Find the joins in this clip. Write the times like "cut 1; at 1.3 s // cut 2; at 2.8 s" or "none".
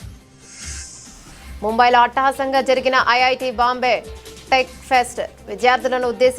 cut 1; at 1.1 s